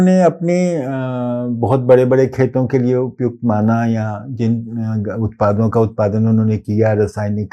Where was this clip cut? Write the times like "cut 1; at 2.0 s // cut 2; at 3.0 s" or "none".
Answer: none